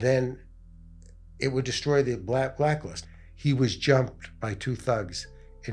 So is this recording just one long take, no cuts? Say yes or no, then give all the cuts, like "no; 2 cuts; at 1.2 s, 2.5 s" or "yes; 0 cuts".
no; 1 cut; at 3.0 s